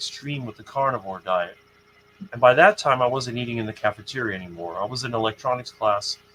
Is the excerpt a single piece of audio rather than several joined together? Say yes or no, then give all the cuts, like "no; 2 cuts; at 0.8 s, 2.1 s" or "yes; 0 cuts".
yes; 0 cuts